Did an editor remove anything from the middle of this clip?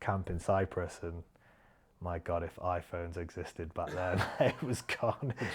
yes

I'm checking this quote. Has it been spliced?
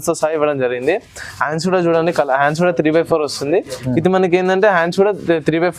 no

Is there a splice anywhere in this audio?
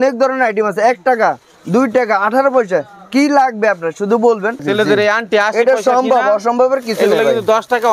yes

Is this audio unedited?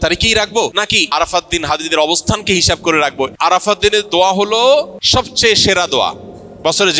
no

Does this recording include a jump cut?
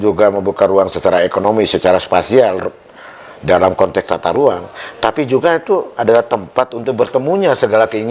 no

